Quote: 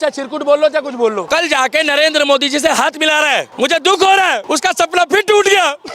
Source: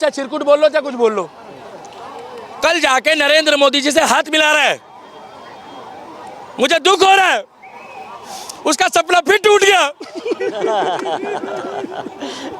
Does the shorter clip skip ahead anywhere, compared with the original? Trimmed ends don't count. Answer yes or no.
yes